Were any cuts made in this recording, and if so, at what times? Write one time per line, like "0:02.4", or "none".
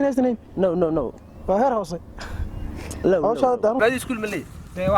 0:03.8